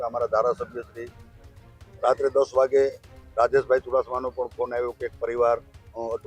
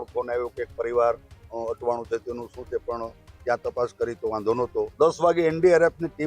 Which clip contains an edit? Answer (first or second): second